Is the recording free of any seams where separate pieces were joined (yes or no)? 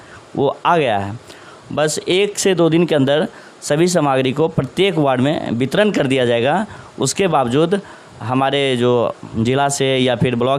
yes